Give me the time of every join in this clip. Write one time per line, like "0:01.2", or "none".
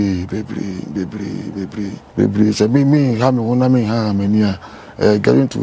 0:02.0